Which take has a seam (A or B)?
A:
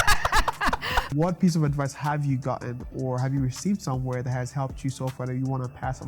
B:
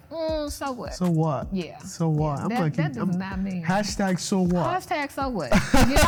A